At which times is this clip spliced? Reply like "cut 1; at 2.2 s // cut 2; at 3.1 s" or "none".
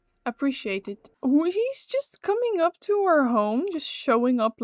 cut 1; at 1.1 s